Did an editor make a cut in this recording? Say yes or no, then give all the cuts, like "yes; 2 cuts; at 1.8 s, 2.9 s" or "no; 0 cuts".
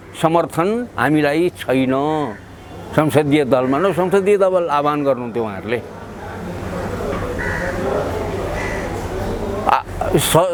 no; 0 cuts